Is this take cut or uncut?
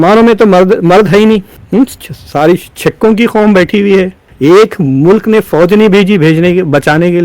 cut